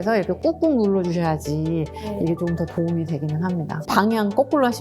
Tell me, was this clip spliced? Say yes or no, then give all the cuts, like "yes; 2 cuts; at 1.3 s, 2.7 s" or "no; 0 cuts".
yes; 1 cut; at 3.8 s